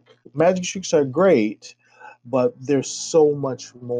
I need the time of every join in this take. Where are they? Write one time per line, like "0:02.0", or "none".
none